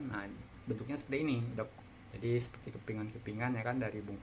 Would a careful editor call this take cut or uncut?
uncut